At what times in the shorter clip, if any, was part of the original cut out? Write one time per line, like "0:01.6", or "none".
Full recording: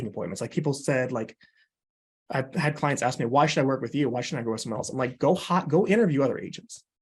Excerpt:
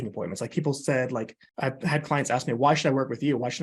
0:01.4